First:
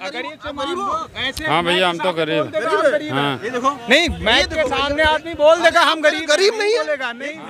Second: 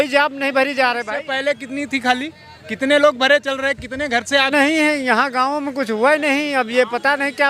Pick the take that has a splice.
second; 1 cut; at 4.5 s

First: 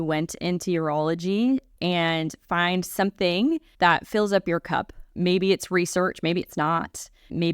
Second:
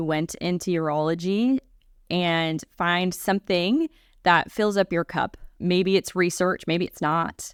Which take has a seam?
first; 2 cuts; at 1.7 s, 3.7 s

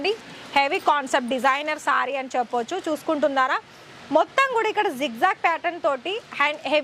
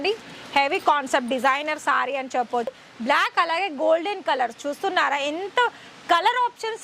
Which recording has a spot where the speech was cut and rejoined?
second; 1 cut; at 2.7 s

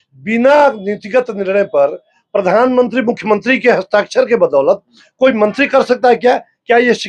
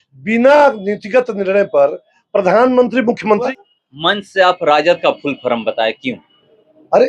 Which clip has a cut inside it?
second; 1 cut; at 3.5 s

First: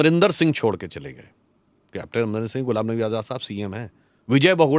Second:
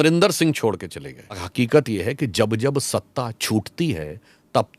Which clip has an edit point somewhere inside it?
second; 1 cut; at 1.4 s

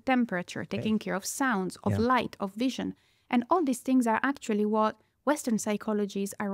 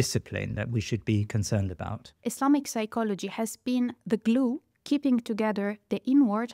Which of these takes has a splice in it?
second; 1 cut; at 2.2 s

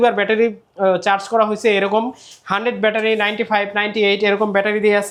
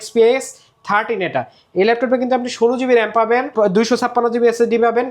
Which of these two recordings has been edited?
second; 1 cut; at 3.5 s

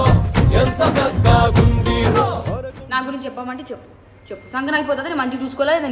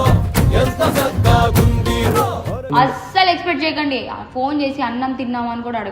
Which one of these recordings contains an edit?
second; 1 cut; at 2.6 s

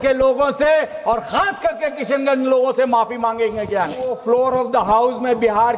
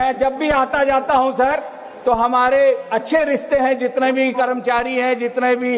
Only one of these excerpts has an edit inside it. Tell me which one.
first; 1 cut; at 4.2 s

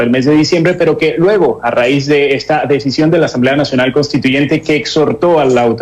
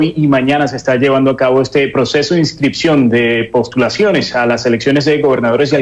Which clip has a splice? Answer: first; 1 cut; at 4.8 s

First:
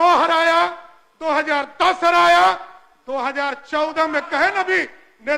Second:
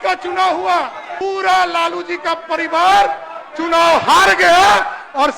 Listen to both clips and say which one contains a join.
second; 1 cut; at 1.2 s

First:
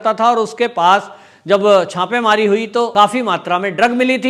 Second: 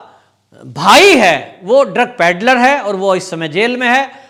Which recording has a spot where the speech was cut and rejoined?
first; 1 cut; at 2.9 s

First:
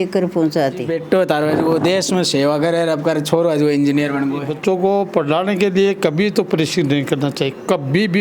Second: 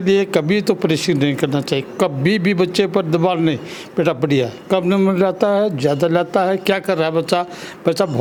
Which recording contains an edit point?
first; 2 cuts; at 0.9 s, 4.5 s

